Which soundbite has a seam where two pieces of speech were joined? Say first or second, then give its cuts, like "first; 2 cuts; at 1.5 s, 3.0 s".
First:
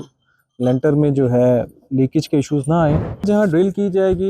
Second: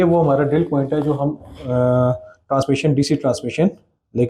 first; 1 cut; at 3.1 s